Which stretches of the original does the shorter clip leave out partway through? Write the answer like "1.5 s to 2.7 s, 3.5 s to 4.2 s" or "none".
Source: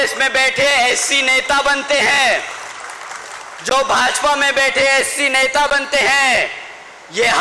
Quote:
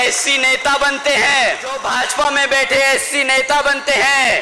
2.7 s to 3.9 s

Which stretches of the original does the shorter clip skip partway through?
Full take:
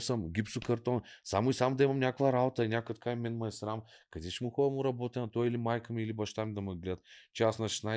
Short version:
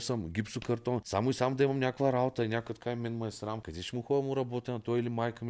1.1 s to 1.3 s, 3.9 s to 4.2 s

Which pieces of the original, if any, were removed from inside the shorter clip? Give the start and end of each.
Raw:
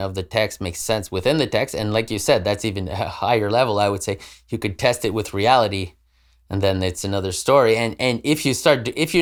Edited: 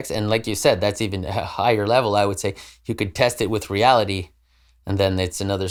none

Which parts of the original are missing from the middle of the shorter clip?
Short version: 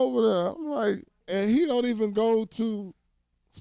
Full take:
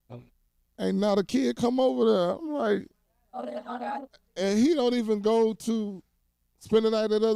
3.0 s to 4.2 s

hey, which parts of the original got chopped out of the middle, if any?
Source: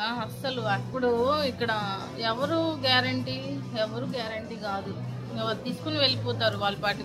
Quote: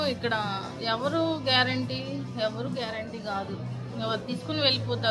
none

